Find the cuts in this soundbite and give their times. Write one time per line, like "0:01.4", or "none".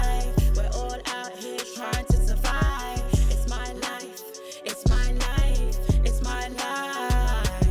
none